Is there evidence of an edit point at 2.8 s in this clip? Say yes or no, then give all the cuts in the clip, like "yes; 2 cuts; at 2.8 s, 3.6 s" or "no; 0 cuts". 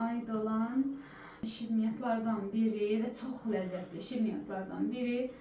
no; 1 cut; at 1.5 s